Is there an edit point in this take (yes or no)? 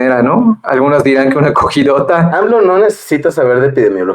yes